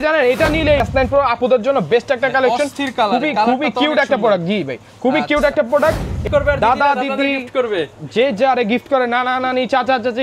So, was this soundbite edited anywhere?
yes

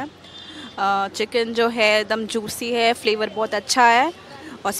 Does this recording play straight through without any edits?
yes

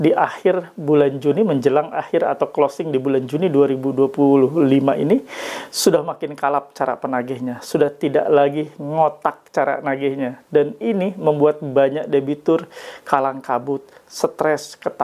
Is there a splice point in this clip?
no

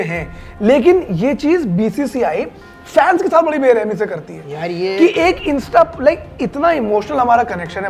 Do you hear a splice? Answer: no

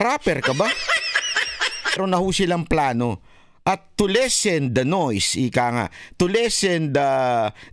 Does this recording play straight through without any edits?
no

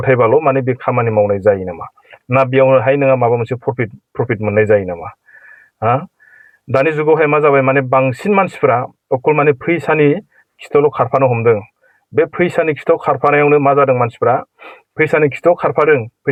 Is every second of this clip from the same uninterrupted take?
yes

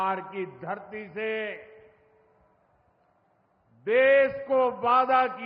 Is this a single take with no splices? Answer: yes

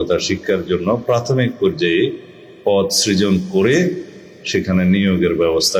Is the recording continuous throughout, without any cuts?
yes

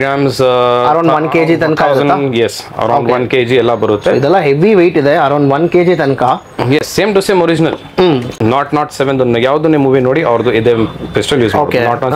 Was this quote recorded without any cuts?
no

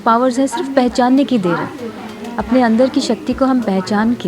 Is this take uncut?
yes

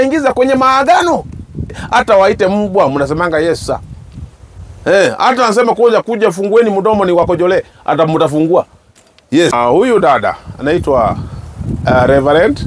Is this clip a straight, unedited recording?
no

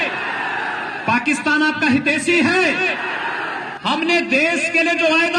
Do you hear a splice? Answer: yes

